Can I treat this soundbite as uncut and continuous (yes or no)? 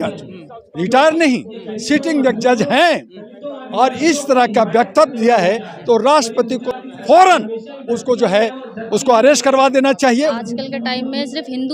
no